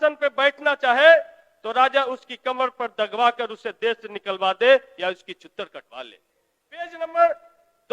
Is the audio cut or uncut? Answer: cut